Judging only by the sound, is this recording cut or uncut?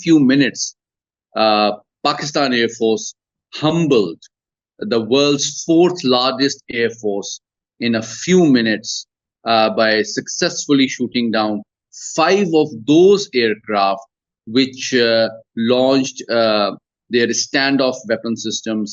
uncut